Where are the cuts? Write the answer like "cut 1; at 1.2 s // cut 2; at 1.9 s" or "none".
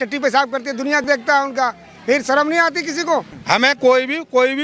cut 1; at 3.3 s